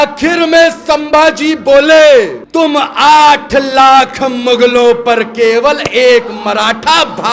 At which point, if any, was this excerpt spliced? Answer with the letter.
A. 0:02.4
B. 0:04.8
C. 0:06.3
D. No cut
A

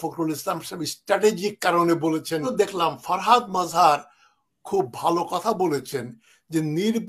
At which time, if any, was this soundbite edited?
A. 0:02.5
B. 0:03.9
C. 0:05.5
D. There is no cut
A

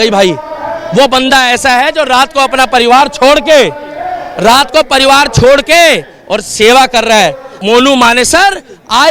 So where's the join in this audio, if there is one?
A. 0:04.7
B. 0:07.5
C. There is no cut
B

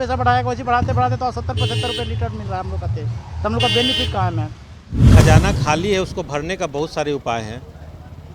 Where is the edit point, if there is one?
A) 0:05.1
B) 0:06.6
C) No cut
A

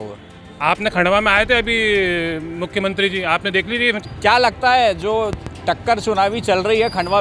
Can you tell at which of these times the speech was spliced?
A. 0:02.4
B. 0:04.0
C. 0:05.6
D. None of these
B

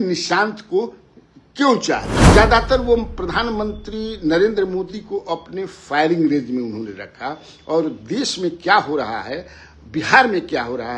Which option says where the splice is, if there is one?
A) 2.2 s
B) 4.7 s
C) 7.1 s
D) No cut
A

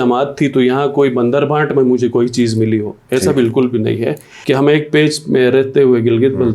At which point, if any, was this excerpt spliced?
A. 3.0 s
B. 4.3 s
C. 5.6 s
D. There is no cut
B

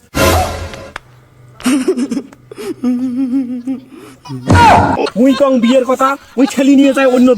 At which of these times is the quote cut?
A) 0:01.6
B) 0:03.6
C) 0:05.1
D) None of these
C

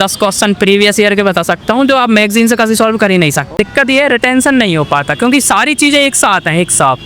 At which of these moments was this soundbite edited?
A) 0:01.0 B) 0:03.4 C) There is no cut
B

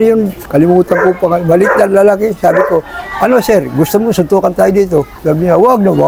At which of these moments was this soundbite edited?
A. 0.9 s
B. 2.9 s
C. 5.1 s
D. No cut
D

